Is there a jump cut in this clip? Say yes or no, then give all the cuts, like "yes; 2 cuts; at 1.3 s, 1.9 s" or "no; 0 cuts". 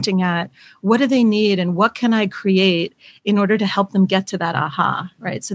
no; 0 cuts